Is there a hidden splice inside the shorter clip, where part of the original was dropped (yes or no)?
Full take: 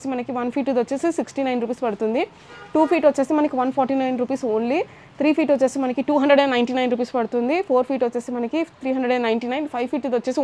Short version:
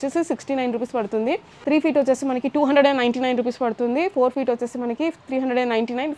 yes